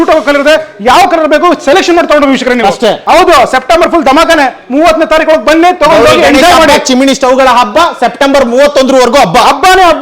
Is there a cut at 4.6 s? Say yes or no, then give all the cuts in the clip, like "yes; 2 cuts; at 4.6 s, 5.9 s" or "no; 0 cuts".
no; 1 cut; at 3.0 s